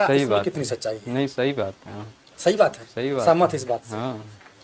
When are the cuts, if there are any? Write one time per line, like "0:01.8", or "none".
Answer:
none